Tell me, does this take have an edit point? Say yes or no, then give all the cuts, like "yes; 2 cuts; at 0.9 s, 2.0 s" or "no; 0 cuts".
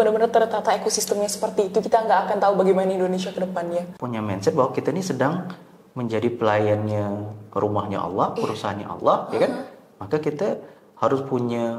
yes; 1 cut; at 3.9 s